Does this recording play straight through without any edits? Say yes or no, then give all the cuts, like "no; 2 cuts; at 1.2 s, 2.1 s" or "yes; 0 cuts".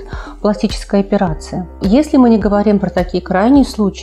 no; 1 cut; at 1.8 s